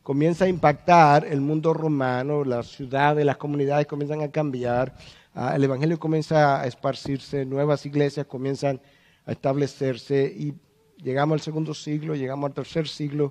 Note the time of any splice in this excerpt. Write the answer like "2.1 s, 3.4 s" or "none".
5.8 s